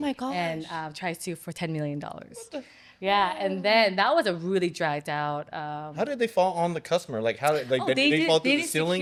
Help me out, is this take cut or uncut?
uncut